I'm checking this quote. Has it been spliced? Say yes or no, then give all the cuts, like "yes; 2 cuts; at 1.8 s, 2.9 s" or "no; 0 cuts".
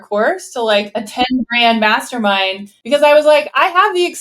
yes; 2 cuts; at 1.0 s, 2.7 s